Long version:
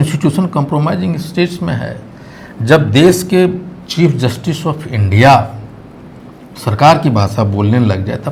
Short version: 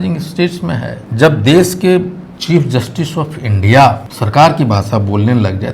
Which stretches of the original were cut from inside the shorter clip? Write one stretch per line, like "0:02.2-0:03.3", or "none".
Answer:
0:02.0-0:02.5
0:05.6-0:06.6